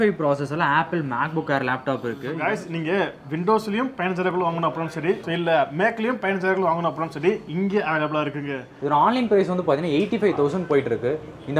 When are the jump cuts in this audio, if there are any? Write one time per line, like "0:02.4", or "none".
0:02.3
0:08.7